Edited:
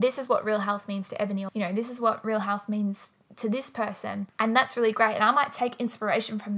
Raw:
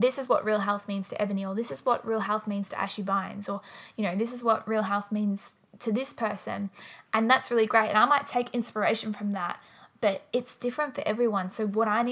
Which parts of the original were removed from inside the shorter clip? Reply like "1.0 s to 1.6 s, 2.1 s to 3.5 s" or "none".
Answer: 1.5 s to 3.9 s, 6.7 s to 7.0 s